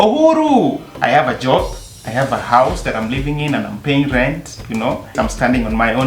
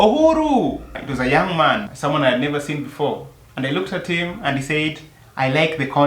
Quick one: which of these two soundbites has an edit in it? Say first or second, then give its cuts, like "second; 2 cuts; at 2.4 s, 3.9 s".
first; 2 cuts; at 0.9 s, 5.1 s